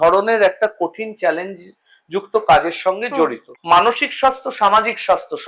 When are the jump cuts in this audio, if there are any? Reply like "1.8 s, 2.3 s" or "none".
3.5 s